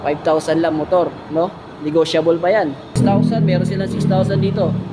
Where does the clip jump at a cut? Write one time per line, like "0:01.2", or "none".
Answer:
0:03.0